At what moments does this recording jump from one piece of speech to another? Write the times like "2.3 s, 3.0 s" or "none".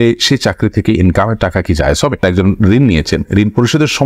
2.2 s